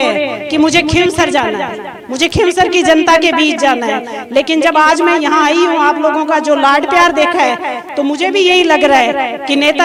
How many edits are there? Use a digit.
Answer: 0